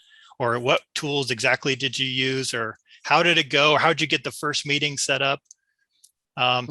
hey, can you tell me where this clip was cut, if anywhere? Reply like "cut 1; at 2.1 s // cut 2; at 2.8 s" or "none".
none